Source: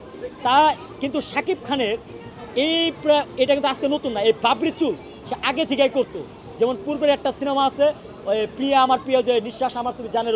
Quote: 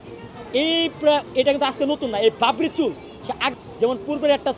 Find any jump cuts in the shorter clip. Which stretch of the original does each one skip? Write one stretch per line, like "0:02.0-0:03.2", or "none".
0:05.5-0:06.3